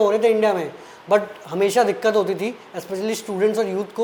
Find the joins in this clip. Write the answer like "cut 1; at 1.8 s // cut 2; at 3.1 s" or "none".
none